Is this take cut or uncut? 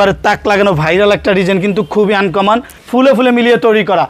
cut